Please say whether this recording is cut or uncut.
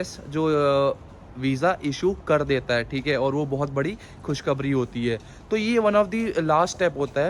uncut